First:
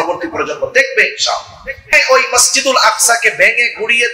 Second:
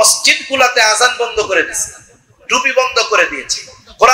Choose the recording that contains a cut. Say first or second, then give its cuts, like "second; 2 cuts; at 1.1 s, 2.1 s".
first; 1 cut; at 1.9 s